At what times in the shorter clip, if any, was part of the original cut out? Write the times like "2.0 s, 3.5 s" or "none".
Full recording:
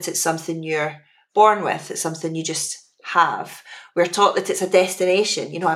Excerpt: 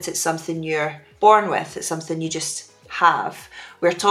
1.0 s